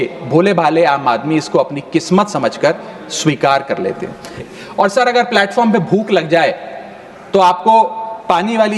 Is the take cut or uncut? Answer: cut